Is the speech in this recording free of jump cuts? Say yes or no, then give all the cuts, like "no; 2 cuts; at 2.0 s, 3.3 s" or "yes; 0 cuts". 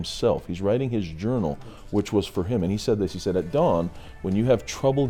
yes; 0 cuts